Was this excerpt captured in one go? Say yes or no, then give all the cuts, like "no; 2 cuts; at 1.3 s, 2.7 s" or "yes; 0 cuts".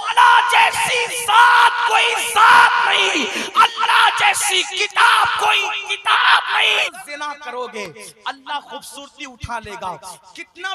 no; 1 cut; at 6.9 s